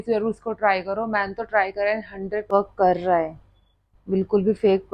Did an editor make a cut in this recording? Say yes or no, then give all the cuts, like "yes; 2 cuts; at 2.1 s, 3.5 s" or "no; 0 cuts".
yes; 1 cut; at 2.5 s